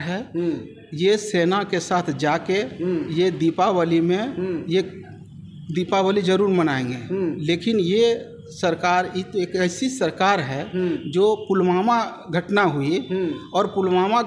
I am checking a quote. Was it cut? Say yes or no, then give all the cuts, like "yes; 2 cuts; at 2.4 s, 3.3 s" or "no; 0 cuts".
no; 0 cuts